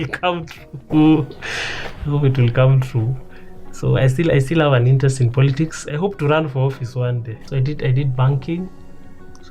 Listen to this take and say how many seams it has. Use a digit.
1